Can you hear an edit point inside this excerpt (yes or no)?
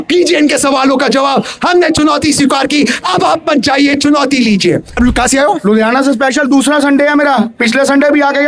yes